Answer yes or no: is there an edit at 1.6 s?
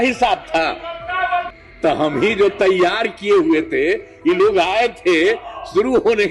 yes